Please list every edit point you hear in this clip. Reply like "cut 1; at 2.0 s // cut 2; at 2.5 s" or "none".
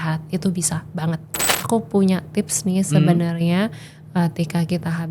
cut 1; at 1.5 s